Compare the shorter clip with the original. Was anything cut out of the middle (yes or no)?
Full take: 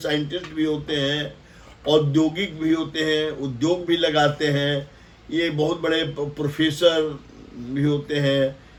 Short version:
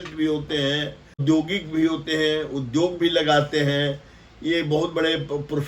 yes